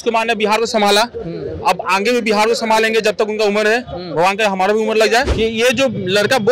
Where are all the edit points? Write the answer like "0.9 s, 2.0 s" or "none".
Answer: 5.3 s